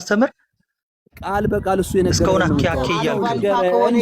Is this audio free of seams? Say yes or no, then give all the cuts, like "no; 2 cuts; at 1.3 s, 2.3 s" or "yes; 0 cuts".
no; 1 cut; at 3.1 s